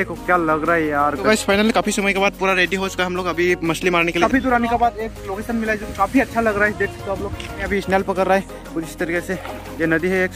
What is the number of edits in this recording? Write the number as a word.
three